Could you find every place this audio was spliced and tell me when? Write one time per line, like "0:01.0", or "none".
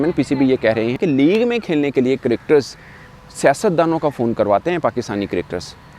0:01.0